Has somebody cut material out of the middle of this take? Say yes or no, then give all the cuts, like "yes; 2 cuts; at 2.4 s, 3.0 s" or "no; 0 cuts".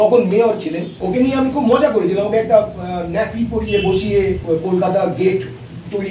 yes; 2 cuts; at 1.0 s, 4.4 s